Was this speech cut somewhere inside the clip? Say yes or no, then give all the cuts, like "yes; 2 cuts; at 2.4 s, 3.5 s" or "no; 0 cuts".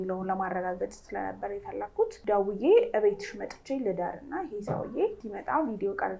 yes; 2 cuts; at 2.2 s, 5.3 s